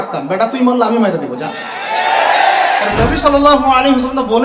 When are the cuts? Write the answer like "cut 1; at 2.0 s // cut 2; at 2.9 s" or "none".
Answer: cut 1; at 2.9 s